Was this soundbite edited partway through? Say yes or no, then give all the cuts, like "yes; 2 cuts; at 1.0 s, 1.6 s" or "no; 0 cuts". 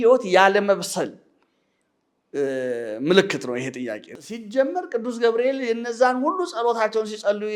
yes; 1 cut; at 4.1 s